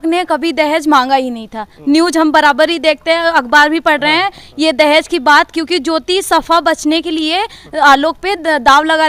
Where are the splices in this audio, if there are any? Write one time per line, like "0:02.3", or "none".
none

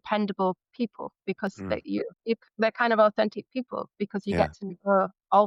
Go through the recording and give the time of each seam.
none

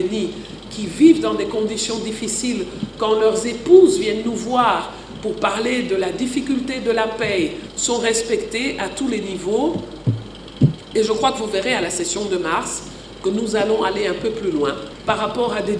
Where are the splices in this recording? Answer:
0:07.7
0:14.9

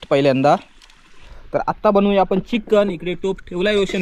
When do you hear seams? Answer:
0:01.3

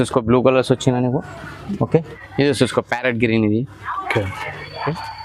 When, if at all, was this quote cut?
0:02.2

